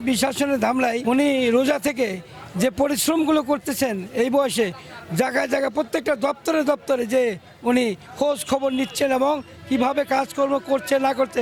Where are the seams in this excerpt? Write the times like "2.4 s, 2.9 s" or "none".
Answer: 1.0 s